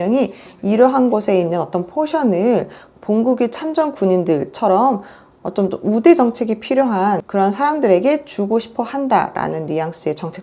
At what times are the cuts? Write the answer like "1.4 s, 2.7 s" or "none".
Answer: 7.3 s